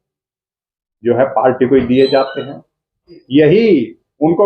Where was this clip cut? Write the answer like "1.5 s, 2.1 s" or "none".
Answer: 3.2 s